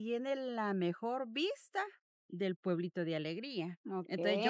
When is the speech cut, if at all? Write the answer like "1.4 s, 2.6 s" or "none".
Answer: none